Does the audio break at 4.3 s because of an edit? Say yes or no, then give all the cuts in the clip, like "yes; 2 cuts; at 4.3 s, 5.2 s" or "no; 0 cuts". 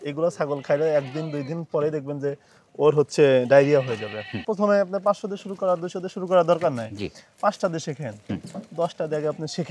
yes; 1 cut; at 4.3 s